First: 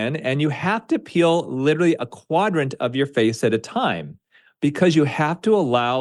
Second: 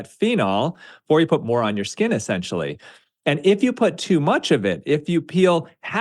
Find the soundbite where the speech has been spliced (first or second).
second